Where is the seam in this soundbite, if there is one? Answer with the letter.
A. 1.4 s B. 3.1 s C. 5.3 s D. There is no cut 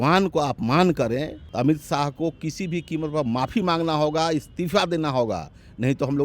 A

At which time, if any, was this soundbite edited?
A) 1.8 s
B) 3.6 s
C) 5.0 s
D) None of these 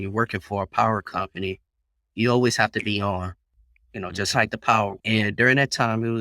C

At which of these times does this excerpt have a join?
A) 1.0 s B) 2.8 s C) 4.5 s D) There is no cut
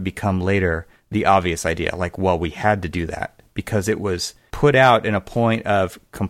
C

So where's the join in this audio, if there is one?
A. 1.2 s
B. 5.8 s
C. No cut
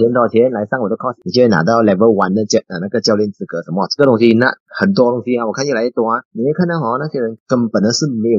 A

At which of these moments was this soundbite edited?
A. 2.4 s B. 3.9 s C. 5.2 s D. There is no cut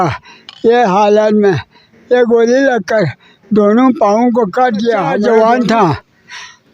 C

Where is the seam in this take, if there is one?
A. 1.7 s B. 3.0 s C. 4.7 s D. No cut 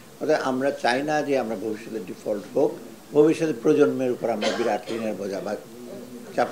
B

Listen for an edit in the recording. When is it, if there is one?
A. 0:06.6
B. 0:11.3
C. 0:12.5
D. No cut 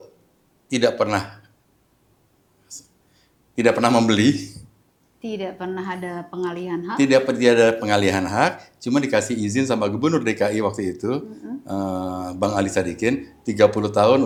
D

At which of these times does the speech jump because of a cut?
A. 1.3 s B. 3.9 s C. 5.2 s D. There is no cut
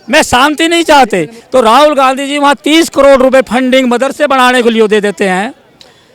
A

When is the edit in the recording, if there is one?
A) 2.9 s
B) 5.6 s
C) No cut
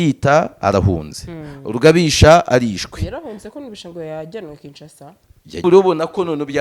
B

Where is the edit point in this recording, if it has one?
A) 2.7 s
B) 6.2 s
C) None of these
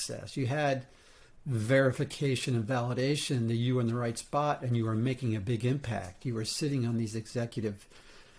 C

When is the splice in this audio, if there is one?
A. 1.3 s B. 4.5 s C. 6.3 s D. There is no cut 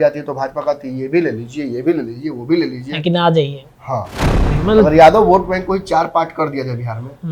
B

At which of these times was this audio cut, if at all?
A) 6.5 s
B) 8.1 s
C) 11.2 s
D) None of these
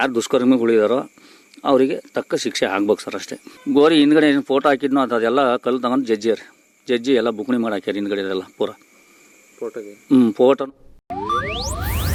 D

